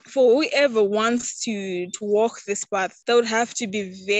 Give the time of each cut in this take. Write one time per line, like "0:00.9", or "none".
none